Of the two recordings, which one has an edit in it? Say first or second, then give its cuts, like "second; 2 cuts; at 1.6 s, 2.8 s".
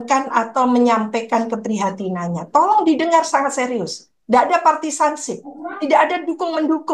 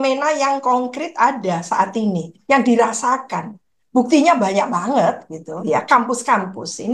second; 1 cut; at 5.5 s